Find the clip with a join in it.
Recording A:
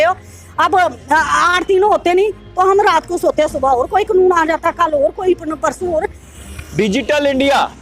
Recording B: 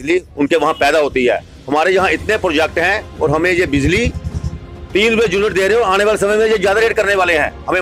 A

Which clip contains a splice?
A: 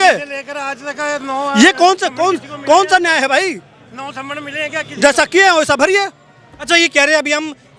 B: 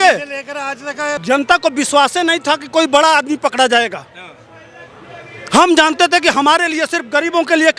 B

